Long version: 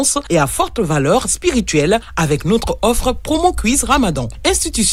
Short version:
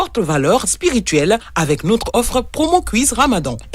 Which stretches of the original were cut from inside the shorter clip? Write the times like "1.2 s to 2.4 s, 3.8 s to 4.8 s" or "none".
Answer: 2.7 s to 2.8 s